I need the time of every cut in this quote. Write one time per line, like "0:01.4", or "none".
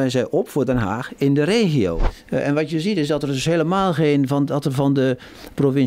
0:02.0